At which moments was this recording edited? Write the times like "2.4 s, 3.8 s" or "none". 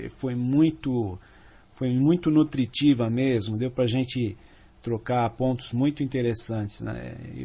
4.8 s